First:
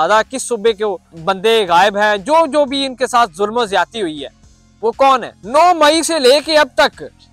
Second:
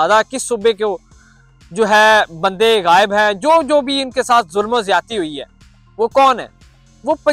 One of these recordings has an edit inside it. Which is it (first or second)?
first